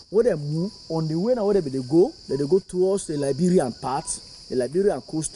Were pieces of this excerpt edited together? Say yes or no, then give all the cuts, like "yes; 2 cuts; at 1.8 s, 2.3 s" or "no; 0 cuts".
no; 0 cuts